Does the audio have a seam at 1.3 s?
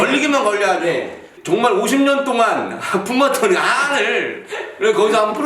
yes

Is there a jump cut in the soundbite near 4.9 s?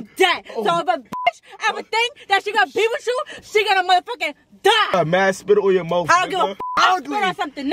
yes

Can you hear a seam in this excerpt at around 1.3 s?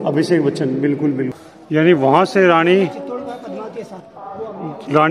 yes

